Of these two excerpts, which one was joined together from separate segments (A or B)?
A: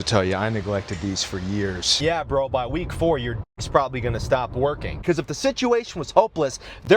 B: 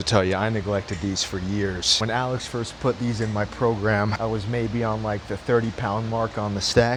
A